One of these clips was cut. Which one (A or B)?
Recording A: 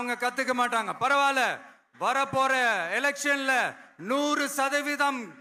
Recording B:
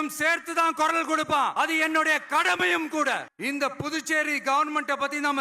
B